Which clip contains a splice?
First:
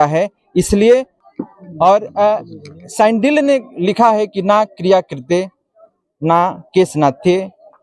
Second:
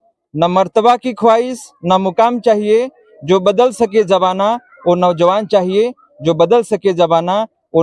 first; 1 cut; at 1.2 s

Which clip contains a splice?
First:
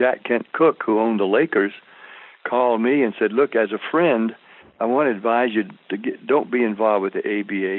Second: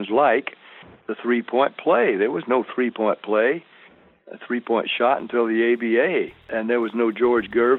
second; 1 cut; at 6.4 s

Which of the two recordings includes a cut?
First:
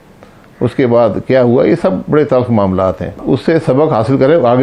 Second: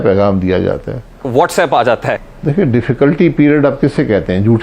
second; 1 cut; at 2.2 s

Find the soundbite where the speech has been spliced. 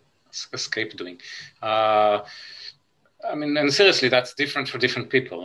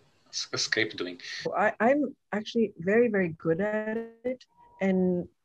second; 1 cut; at 1.5 s

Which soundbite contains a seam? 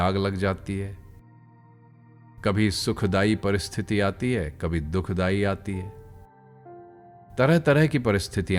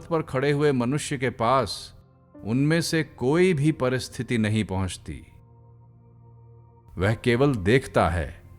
second; 2 cuts; at 5.3 s, 6.5 s

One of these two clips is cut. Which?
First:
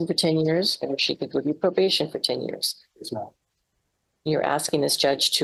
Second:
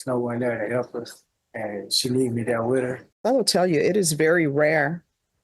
second; 1 cut; at 3.1 s

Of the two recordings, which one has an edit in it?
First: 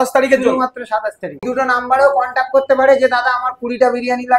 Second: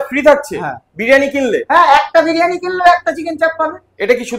first; 1 cut; at 1.4 s

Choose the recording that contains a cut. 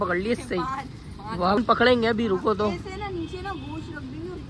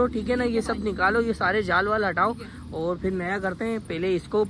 first; 1 cut; at 1.5 s

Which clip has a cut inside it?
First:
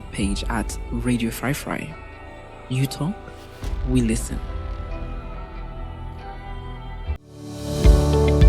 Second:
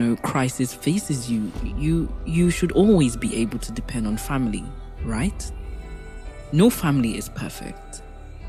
first; 1 cut; at 7.2 s

